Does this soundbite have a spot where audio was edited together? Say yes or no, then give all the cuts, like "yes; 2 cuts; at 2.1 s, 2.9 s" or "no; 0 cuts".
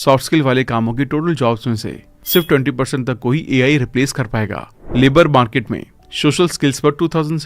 yes; 1 cut; at 4.7 s